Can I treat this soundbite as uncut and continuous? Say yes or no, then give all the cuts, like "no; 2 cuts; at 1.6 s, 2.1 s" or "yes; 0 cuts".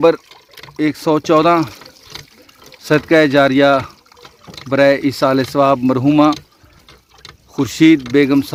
yes; 0 cuts